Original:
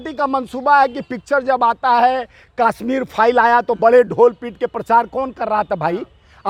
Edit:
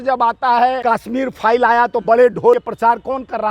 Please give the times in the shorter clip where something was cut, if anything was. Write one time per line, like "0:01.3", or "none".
0:00.8
0:02.6

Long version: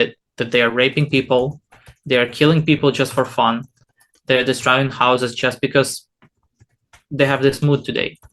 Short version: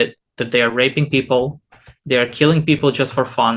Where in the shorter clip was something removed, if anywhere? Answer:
none

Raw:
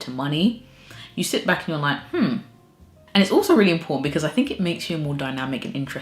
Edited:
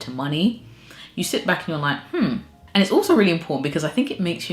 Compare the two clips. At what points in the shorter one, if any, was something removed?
0:02.5

